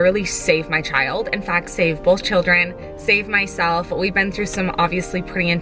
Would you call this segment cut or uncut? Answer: uncut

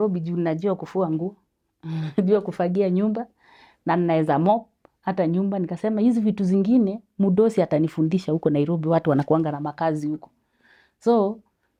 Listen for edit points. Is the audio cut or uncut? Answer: uncut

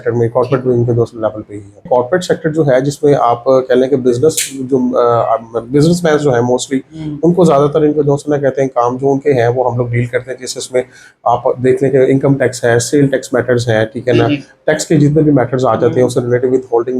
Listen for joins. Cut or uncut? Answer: cut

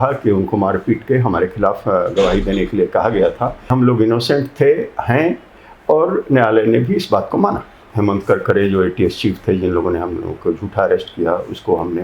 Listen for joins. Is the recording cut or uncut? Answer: cut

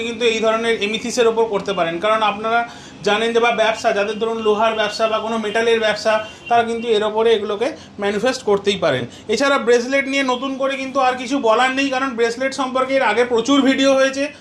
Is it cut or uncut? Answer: uncut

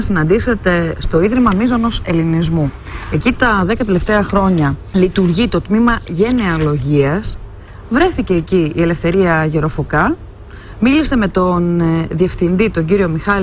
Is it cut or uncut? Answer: uncut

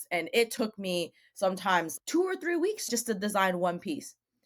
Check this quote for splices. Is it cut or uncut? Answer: cut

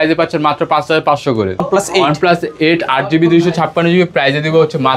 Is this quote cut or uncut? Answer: cut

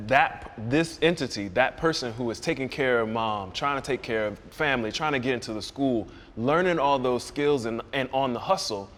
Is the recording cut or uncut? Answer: uncut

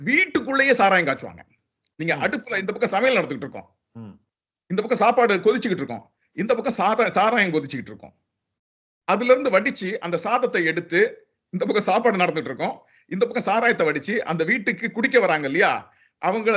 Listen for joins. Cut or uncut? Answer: uncut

